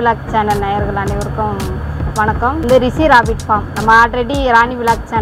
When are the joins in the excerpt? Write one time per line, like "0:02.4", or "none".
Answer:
0:02.6